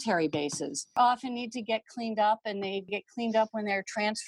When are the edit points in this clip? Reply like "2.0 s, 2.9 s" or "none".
1.0 s